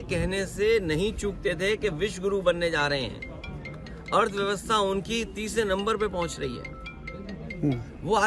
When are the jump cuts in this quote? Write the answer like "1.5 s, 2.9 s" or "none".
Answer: none